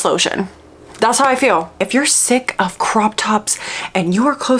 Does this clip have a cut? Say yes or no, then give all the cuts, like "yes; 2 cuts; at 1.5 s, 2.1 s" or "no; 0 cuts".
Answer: yes; 1 cut; at 1.8 s